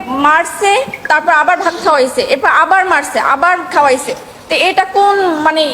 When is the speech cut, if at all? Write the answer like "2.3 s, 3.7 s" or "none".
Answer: none